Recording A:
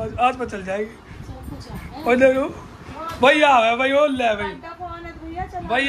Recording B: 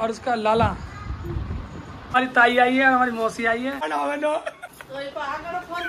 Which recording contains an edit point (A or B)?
B